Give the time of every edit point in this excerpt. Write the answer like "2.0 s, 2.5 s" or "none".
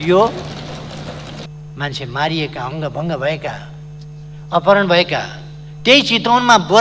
1.5 s